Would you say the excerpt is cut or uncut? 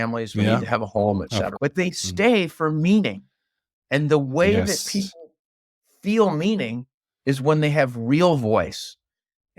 cut